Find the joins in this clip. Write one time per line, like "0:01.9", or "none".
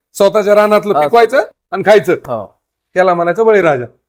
none

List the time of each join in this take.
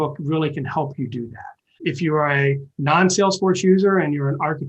0:01.8

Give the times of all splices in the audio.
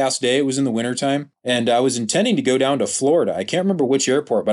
0:01.3

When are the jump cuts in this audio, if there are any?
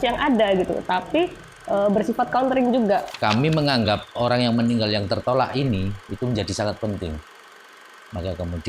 0:03.1

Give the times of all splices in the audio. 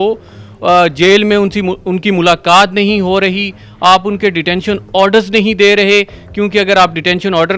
none

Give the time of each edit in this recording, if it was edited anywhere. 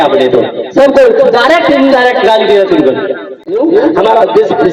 0:03.4

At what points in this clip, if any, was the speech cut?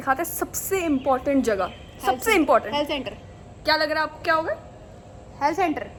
none

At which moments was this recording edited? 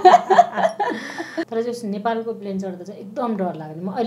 0:01.4

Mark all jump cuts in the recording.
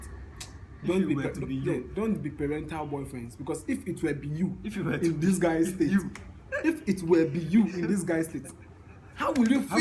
0:08.6

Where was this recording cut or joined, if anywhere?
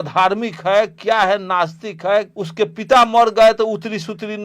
0:02.3

